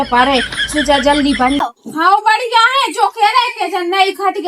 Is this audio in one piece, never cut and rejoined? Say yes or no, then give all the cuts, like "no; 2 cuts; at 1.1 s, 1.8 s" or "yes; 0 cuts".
no; 1 cut; at 1.6 s